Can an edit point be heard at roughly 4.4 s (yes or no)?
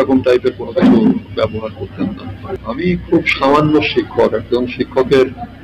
no